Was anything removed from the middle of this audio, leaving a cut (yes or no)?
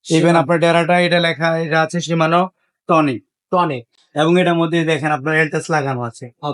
no